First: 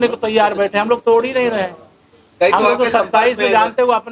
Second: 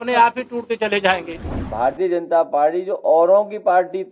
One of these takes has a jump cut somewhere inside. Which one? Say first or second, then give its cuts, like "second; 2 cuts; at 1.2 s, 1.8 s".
second; 1 cut; at 1.4 s